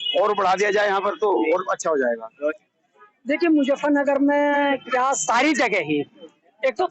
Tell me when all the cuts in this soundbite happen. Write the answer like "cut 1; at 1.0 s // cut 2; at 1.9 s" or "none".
cut 1; at 2.5 s